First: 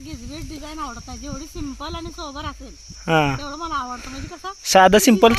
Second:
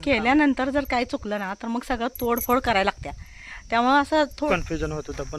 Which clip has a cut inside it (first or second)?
second